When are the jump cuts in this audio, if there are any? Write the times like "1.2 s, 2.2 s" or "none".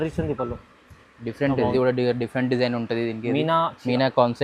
1.7 s